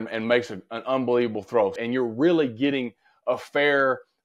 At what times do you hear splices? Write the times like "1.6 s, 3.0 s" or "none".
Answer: 1.7 s